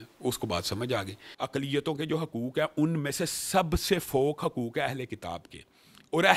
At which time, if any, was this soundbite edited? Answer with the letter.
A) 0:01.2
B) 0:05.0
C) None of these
A